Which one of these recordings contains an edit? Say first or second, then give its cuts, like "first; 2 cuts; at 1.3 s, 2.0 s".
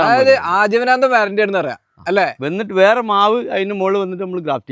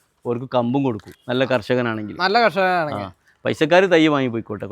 second; 1 cut; at 1.1 s